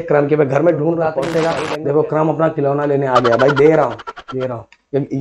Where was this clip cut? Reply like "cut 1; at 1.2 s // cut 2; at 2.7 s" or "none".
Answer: cut 1; at 1.2 s